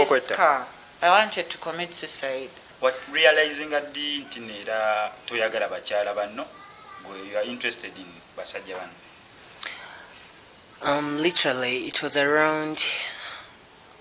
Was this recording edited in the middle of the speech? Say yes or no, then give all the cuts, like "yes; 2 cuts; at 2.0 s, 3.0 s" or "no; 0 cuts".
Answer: yes; 1 cut; at 2.6 s